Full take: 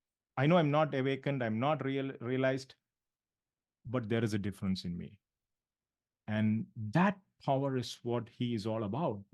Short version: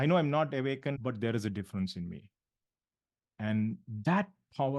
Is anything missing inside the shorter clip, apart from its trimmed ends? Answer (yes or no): yes